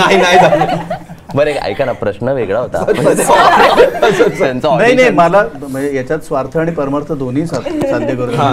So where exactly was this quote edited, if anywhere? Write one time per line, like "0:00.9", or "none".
none